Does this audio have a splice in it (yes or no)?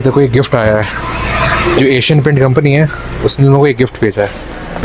no